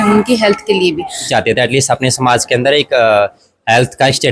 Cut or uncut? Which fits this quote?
cut